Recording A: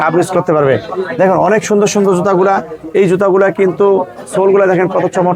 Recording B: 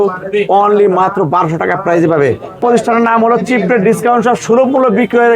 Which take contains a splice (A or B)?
B